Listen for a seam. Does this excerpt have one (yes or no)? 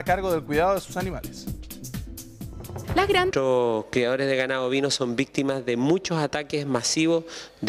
no